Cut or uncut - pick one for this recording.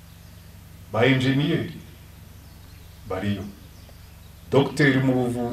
uncut